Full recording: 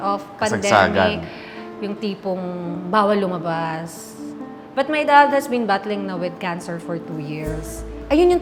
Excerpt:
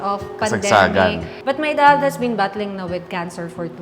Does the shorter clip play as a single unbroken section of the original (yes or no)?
no